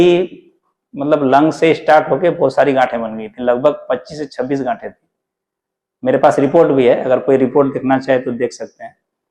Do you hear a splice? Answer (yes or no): no